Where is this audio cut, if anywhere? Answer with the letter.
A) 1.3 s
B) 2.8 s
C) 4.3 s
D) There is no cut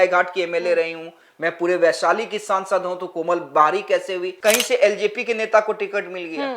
C